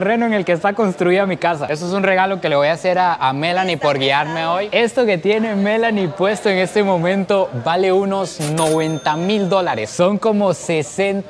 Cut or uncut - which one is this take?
cut